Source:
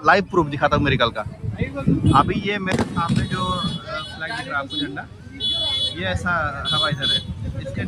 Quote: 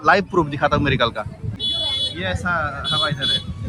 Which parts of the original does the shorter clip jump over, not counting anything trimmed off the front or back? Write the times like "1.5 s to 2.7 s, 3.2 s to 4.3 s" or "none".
1.4 s to 5.2 s